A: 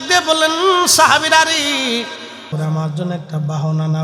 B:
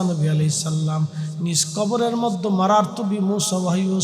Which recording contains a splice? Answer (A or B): A